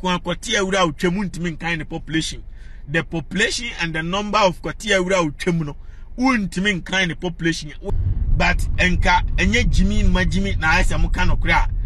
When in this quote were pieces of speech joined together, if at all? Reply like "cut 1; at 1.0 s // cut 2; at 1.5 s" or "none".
cut 1; at 7.9 s